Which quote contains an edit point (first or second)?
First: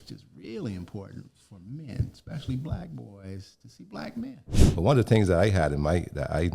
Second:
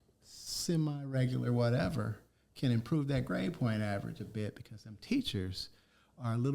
first